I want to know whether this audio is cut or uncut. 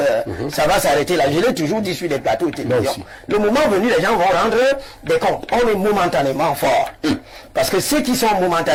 uncut